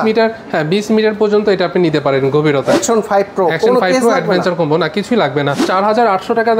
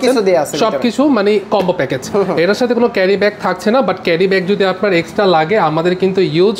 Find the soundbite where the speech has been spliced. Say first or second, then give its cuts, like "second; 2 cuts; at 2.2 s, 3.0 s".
first; 1 cut; at 5.6 s